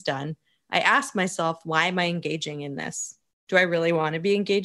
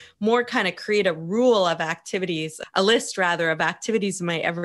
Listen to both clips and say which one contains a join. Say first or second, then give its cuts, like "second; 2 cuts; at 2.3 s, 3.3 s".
second; 1 cut; at 2.6 s